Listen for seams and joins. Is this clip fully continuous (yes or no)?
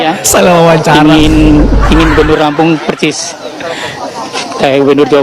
yes